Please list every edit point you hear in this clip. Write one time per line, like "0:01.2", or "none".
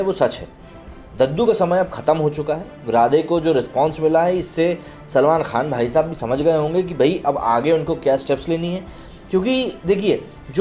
none